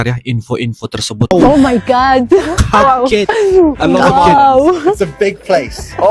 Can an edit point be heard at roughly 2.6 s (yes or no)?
no